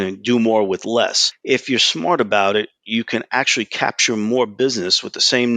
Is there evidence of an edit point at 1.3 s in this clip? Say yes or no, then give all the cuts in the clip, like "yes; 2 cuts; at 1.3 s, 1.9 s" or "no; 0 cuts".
yes; 1 cut; at 1.3 s